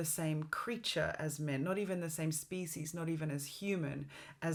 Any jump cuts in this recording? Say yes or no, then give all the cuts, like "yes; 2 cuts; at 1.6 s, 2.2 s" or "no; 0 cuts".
no; 0 cuts